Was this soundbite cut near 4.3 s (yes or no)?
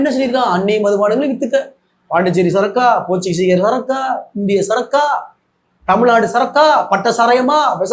no